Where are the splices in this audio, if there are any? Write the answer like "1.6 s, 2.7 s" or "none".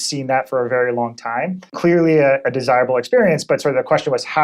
1.7 s